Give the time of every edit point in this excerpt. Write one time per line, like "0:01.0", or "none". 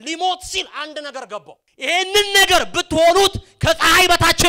0:01.6